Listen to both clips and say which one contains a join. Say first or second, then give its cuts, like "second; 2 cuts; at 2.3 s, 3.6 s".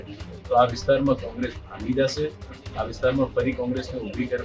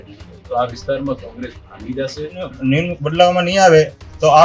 second; 1 cut; at 2.5 s